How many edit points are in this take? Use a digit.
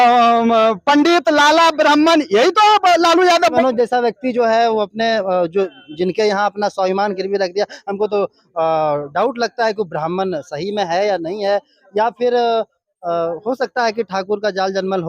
1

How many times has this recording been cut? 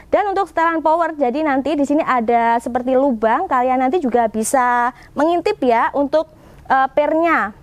0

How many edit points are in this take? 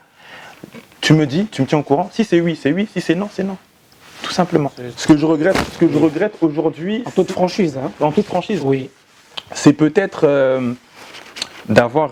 1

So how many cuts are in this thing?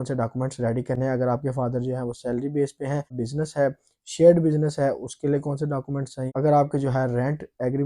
2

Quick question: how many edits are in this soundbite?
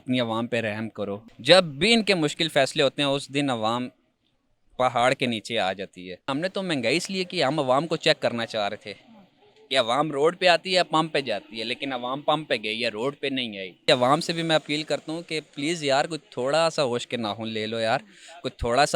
3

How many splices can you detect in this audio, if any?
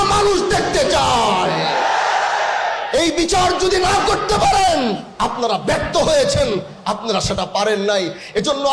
1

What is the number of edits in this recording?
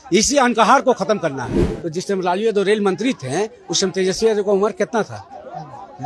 1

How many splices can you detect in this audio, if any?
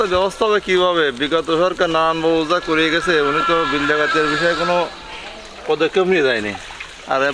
0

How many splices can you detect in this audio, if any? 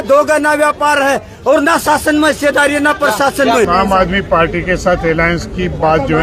1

